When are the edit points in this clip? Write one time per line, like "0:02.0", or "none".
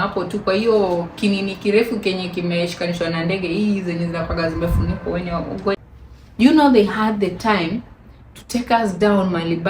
0:05.8